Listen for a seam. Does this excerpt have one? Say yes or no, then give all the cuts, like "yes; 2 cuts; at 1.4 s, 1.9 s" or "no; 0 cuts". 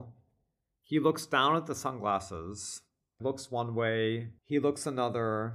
yes; 1 cut; at 3.2 s